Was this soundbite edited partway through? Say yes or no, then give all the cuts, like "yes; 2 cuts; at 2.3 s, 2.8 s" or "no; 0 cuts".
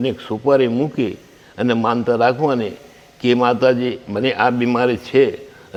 no; 0 cuts